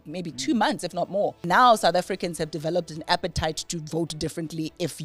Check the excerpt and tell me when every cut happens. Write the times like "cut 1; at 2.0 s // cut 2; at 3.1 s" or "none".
cut 1; at 1.4 s